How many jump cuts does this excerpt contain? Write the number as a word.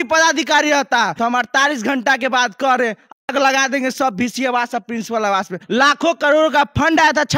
two